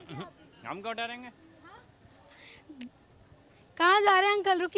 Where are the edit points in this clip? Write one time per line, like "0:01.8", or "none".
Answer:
none